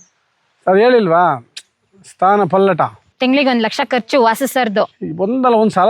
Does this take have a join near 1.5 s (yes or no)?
no